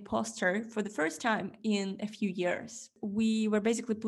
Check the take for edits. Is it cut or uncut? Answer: cut